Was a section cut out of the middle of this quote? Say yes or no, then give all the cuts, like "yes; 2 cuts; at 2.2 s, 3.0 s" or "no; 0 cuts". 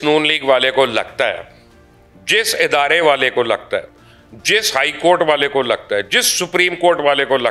no; 0 cuts